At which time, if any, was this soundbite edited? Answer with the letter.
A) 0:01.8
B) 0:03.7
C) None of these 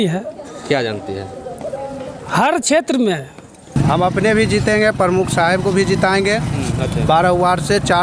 B